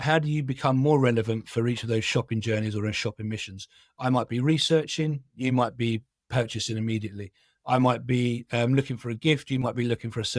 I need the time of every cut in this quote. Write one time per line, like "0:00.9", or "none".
none